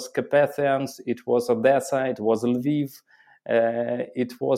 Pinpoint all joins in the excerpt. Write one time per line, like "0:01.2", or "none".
none

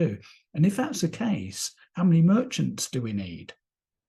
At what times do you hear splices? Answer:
none

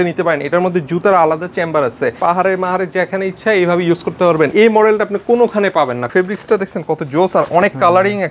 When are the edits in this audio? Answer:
0:02.2
0:04.5
0:06.1

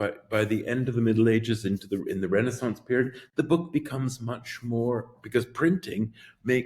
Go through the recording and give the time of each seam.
none

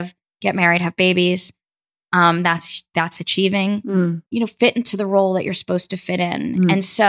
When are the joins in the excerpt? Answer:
none

